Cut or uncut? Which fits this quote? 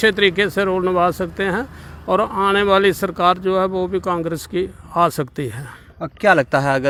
uncut